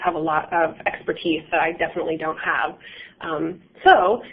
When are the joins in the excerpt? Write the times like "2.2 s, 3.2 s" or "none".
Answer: 1.9 s